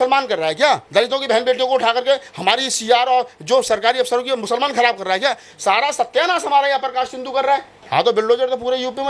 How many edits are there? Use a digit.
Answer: 2